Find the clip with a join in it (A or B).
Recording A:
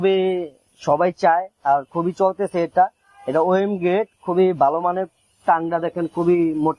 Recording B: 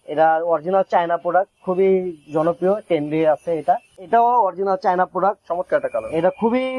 B